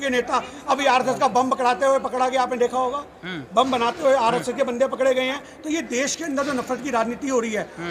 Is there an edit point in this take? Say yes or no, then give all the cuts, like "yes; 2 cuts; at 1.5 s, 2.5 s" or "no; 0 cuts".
no; 0 cuts